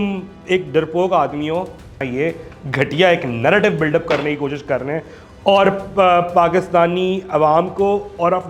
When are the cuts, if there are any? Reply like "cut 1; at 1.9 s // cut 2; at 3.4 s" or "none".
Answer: cut 1; at 2.0 s